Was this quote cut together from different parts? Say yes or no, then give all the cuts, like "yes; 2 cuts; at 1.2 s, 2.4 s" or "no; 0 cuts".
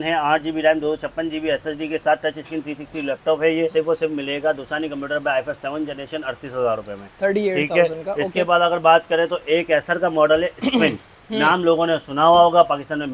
no; 0 cuts